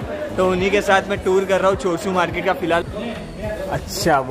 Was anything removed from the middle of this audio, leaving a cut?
yes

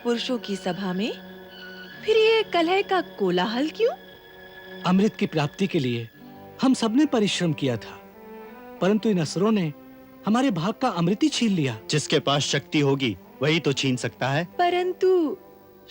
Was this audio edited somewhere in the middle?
yes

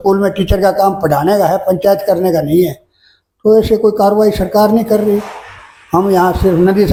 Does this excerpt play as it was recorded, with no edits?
yes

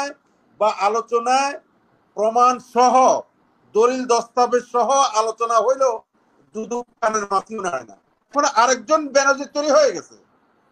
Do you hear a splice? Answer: yes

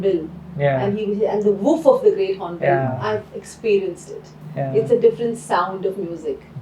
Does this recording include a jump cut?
no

